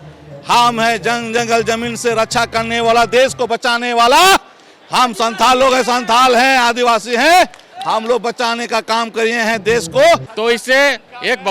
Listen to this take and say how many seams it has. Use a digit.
1